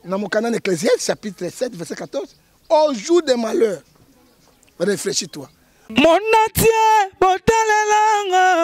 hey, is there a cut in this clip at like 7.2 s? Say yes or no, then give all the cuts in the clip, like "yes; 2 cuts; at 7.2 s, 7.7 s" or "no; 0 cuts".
no; 1 cut; at 5.8 s